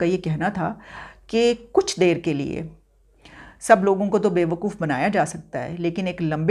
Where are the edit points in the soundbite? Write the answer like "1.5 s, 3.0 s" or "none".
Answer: none